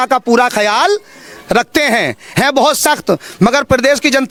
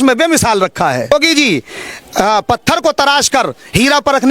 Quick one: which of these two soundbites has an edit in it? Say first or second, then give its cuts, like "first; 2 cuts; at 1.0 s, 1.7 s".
second; 1 cut; at 1.1 s